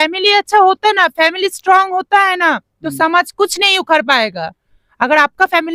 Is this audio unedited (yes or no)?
yes